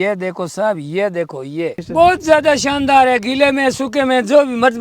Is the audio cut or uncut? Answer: cut